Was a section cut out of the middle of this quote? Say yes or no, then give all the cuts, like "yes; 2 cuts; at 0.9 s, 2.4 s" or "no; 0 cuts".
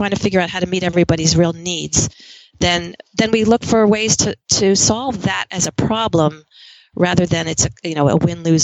no; 0 cuts